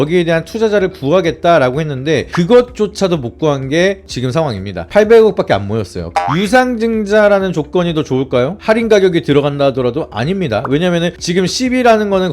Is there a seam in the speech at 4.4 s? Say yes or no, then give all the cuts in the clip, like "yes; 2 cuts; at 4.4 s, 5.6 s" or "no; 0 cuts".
no; 2 cuts; at 2.3 s, 6.1 s